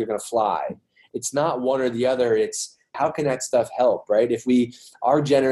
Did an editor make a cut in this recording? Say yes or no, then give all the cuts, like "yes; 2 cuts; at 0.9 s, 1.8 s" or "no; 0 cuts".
yes; 1 cut; at 1.0 s